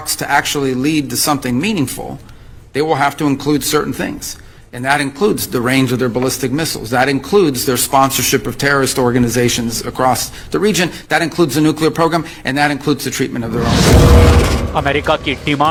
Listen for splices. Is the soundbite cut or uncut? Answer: uncut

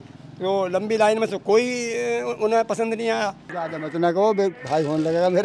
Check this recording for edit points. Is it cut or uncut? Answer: cut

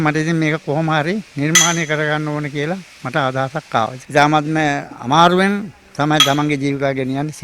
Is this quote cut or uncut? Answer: cut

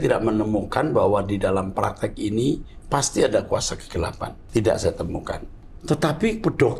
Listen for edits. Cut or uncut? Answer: cut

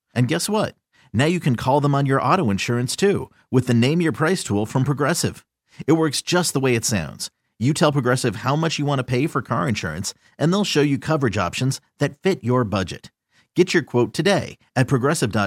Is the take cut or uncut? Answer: uncut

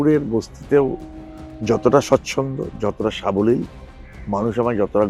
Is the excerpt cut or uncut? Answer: uncut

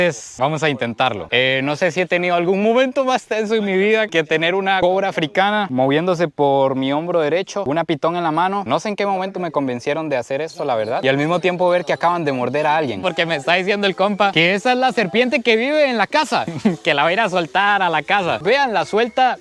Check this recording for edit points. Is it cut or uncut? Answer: cut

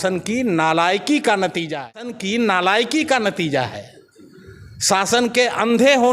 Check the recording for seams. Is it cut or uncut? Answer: cut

